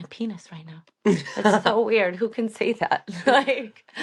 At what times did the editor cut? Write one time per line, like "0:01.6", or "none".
none